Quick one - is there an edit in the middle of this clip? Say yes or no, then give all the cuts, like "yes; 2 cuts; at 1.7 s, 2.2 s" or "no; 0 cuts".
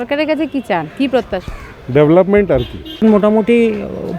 yes; 1 cut; at 2.8 s